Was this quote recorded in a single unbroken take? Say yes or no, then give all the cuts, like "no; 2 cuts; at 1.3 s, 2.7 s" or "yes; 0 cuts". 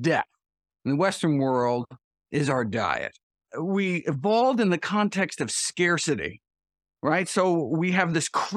no; 1 cut; at 3.4 s